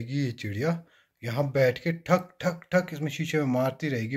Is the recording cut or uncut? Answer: uncut